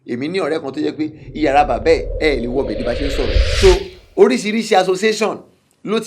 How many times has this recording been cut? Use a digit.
1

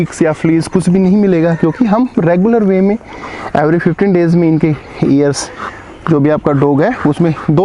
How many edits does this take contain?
1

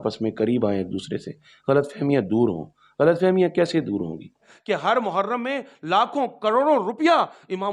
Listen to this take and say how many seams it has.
1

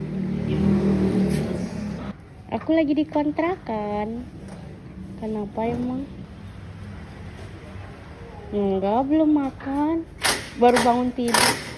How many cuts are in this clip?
2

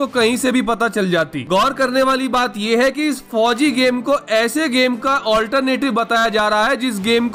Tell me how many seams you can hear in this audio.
0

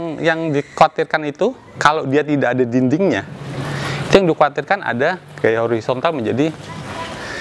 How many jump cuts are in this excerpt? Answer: 0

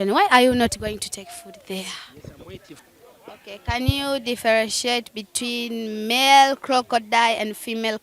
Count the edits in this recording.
1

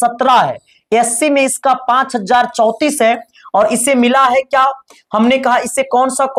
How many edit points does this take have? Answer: 0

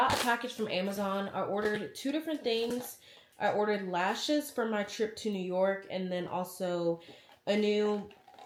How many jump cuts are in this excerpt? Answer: 0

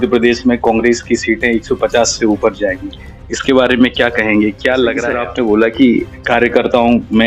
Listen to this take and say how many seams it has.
1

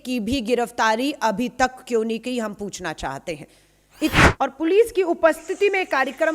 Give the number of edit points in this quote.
1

